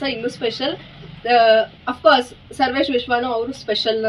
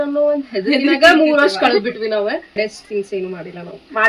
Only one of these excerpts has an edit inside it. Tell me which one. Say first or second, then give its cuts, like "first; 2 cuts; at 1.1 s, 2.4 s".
second; 1 cut; at 2.6 s